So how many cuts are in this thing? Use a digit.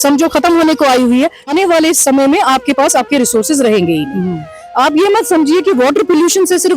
1